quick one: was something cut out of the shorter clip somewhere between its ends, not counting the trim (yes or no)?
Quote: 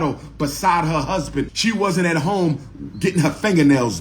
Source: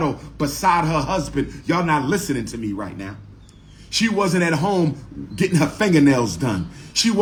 yes